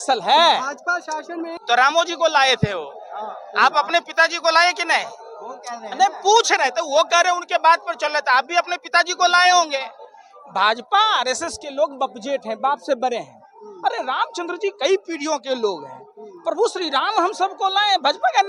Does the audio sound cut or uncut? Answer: cut